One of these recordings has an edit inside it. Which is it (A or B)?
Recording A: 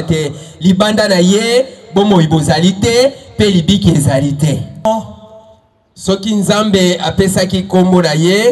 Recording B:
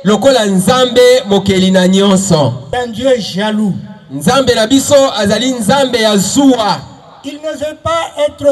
A